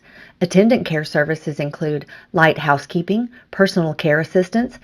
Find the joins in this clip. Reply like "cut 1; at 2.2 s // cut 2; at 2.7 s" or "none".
none